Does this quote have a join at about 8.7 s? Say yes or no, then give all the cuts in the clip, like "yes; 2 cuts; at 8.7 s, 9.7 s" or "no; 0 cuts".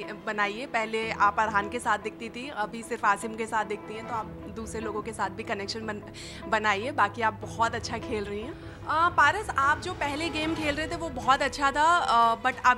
yes; 1 cut; at 8.7 s